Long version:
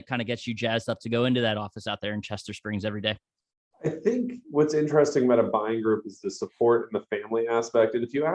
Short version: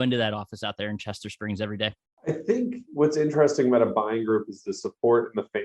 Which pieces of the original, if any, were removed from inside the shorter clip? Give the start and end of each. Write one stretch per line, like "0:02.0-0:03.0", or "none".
0:03.3-0:03.6